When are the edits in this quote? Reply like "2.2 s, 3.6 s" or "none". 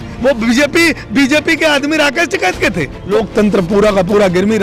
3.0 s